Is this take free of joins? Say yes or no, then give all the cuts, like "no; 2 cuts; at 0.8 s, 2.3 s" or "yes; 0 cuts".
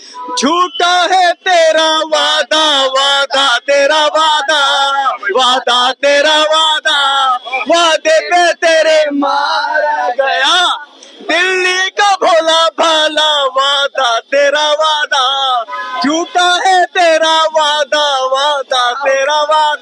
yes; 0 cuts